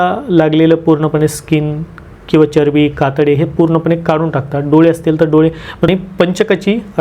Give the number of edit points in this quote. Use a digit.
1